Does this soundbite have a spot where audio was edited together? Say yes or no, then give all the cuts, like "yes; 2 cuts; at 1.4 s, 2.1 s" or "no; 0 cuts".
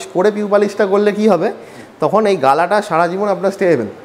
no; 0 cuts